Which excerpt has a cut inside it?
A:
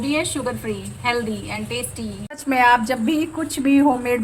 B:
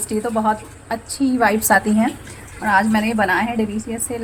A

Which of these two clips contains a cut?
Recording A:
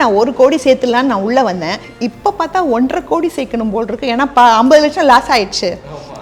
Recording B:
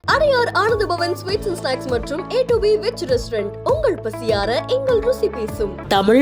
A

